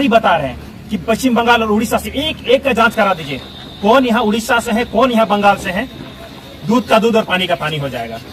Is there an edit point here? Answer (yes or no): no